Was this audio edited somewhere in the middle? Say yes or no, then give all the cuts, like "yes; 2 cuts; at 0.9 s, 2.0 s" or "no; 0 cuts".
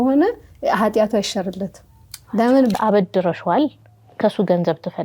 yes; 1 cut; at 2.8 s